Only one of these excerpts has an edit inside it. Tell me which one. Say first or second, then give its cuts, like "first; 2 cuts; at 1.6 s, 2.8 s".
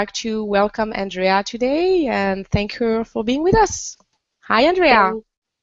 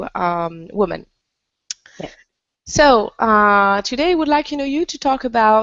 first; 1 cut; at 3.8 s